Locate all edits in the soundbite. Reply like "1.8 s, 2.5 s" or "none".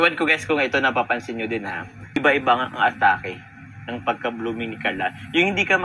2.2 s